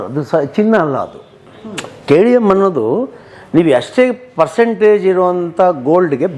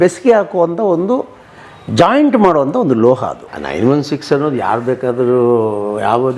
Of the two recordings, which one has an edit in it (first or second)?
second